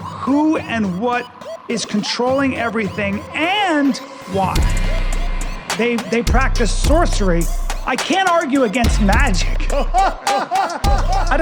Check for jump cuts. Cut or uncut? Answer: uncut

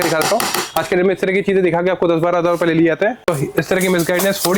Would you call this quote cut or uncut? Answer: cut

